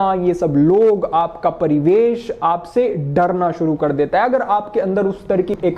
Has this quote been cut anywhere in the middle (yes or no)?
no